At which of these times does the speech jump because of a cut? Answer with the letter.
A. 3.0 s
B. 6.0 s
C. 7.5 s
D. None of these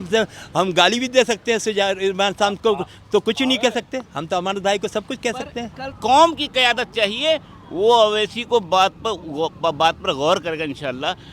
B